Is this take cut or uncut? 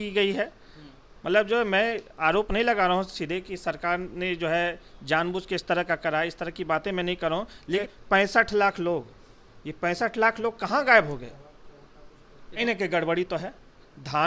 cut